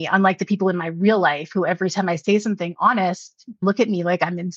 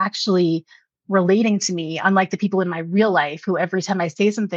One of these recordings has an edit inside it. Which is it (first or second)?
first